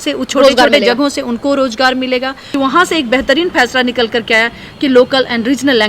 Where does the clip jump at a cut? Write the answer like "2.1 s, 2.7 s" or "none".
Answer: 2.5 s